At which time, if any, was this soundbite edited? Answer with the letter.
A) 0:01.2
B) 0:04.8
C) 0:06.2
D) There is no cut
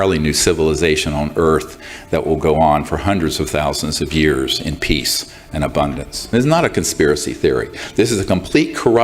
C